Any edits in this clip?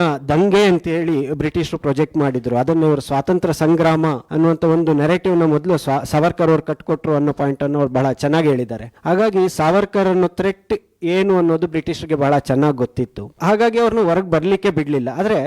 no; 0 cuts

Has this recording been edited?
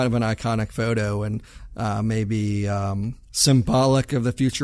yes; 1 cut; at 3.2 s

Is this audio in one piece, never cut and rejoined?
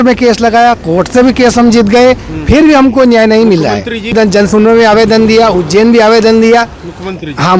no; 1 cut; at 4.1 s

